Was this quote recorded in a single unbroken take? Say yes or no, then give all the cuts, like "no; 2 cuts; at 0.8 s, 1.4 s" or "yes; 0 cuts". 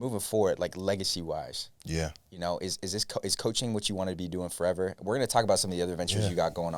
yes; 0 cuts